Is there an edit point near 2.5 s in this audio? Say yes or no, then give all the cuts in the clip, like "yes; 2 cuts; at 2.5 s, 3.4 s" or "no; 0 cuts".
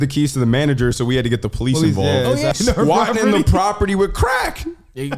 yes; 1 cut; at 2.5 s